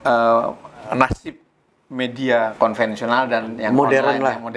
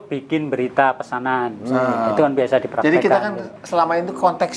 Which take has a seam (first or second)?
first